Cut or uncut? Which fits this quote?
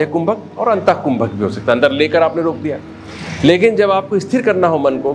uncut